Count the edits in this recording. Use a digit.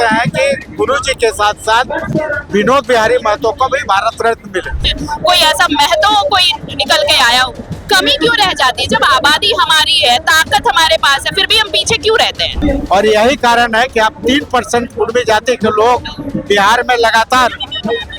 2